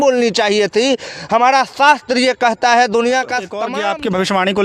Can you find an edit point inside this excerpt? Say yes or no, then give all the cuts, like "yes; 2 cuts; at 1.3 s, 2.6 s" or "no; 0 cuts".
yes; 1 cut; at 3.6 s